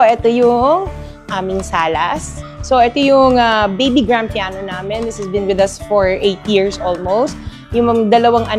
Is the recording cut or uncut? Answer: uncut